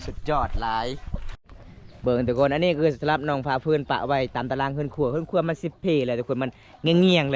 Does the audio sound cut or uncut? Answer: uncut